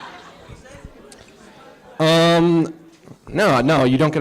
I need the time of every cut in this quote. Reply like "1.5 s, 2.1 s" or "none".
2.5 s

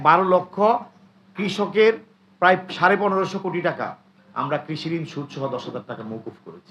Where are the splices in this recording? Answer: none

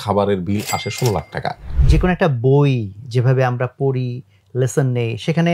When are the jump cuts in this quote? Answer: 1.8 s

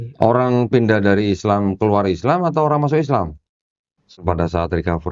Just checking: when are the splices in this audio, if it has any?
4.2 s

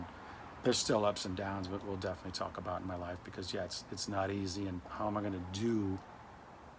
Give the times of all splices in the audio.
4.9 s

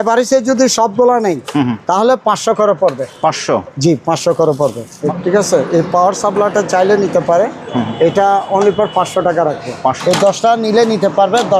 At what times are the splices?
4.9 s, 10.0 s

